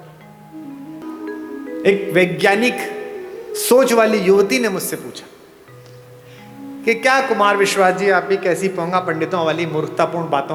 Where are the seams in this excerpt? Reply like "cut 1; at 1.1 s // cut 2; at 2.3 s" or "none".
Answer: none